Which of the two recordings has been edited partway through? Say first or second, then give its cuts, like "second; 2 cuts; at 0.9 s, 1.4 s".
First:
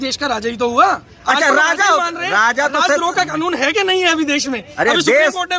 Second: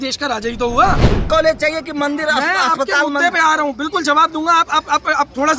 second; 1 cut; at 1.2 s